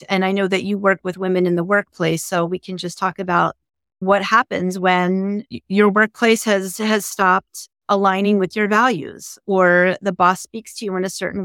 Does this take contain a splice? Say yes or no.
yes